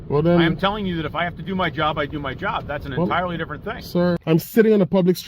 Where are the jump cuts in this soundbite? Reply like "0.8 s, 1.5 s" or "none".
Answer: 4.2 s